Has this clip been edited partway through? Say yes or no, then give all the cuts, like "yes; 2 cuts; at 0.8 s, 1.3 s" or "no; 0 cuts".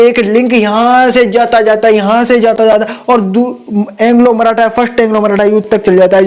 no; 0 cuts